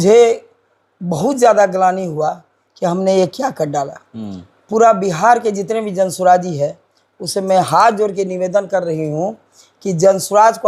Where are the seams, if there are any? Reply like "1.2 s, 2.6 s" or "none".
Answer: none